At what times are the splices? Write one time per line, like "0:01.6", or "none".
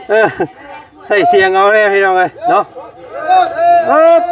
none